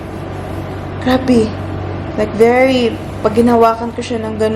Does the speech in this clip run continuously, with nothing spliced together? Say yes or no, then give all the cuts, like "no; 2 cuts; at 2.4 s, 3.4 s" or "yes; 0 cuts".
yes; 0 cuts